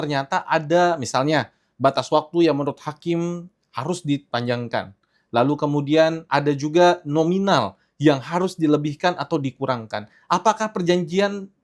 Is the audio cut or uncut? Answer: uncut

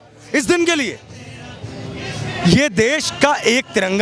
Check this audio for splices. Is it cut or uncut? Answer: uncut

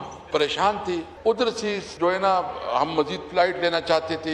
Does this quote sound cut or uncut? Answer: cut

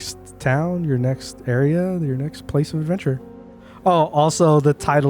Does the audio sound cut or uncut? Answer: cut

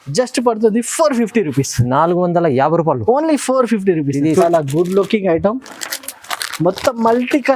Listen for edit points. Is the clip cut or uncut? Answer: cut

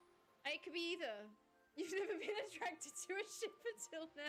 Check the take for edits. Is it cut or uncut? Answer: uncut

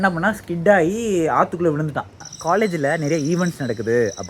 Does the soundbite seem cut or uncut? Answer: cut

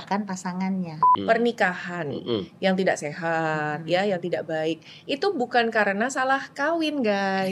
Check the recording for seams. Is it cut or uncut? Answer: cut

